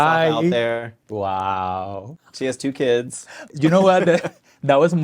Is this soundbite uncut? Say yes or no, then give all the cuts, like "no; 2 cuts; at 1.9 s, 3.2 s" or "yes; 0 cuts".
no; 3 cuts; at 1.0 s, 2.1 s, 3.5 s